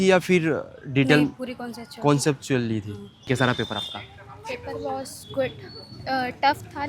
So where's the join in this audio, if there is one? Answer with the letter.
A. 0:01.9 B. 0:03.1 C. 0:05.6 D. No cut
B